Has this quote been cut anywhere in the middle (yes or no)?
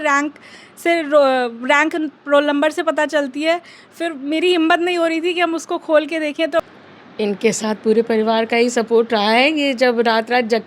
yes